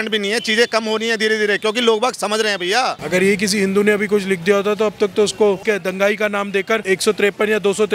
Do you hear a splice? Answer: yes; 3 cuts; at 3.0 s, 5.6 s, 6.8 s

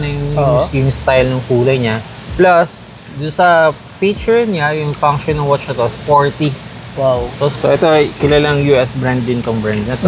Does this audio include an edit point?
yes; 1 cut; at 7.6 s

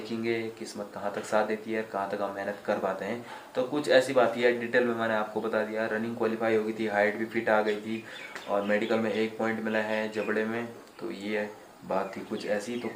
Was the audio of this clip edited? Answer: no; 0 cuts

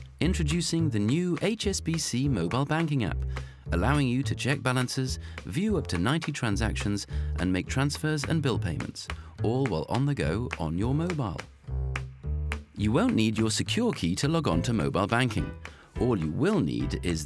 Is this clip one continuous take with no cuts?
yes; 0 cuts

